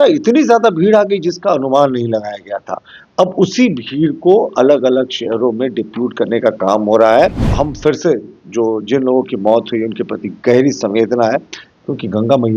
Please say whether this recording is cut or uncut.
cut